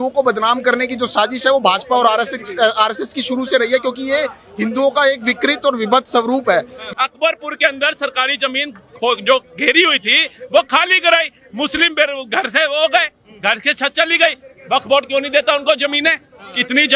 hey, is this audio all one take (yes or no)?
no